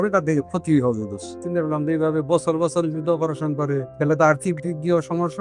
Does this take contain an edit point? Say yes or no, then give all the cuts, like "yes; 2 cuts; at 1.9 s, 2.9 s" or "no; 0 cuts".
yes; 2 cuts; at 1.4 s, 3.9 s